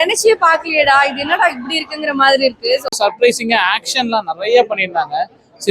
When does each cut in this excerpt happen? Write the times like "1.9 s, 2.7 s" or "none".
2.9 s